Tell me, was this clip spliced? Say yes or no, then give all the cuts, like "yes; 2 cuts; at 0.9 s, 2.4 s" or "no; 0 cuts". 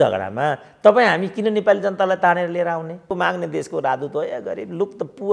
yes; 1 cut; at 3.1 s